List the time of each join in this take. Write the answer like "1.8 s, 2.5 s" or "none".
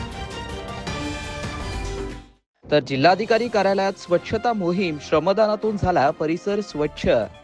none